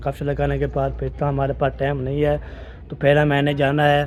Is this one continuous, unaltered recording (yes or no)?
yes